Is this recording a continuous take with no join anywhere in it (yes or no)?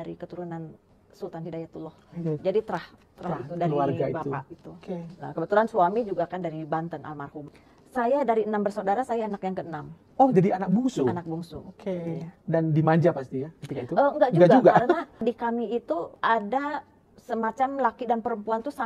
yes